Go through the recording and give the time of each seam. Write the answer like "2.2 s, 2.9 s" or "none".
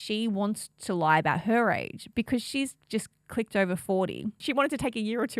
2.8 s, 4.4 s